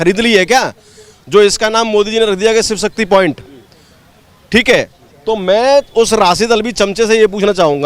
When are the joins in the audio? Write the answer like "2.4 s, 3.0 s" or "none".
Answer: none